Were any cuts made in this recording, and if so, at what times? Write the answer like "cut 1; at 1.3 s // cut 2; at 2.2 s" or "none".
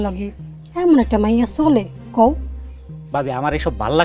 none